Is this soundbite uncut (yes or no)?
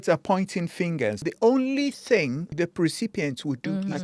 no